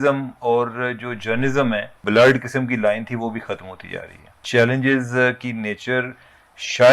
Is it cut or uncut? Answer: cut